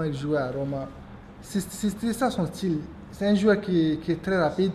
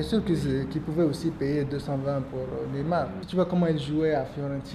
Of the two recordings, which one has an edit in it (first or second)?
second